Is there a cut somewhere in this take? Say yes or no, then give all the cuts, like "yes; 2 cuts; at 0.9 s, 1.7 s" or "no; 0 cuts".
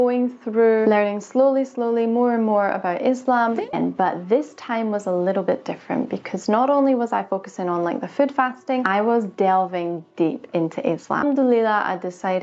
yes; 2 cuts; at 3.8 s, 11.2 s